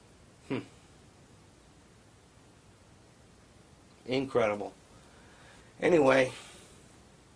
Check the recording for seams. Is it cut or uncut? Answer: uncut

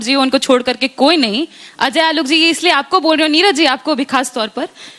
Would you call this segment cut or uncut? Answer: uncut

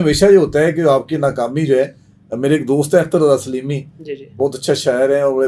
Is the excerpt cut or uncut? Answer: uncut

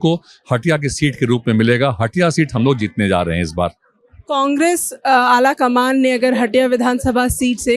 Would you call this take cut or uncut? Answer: uncut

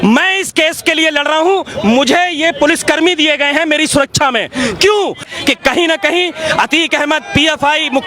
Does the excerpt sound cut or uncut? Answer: cut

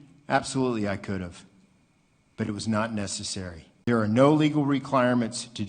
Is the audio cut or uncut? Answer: cut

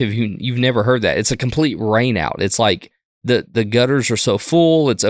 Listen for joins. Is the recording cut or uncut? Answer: uncut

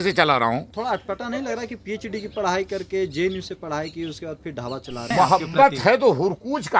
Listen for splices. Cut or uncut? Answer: cut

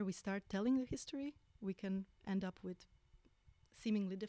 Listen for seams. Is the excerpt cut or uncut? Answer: uncut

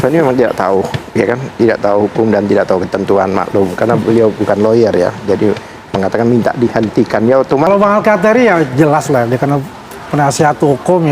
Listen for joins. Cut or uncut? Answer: cut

